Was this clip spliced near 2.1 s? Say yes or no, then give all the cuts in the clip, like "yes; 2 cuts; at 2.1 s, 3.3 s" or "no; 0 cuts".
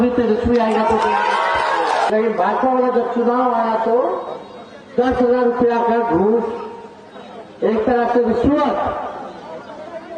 yes; 1 cut; at 2.1 s